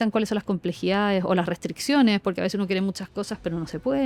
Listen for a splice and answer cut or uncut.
uncut